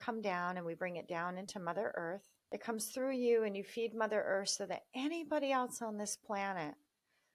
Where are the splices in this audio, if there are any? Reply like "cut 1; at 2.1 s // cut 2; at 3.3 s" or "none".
cut 1; at 2.3 s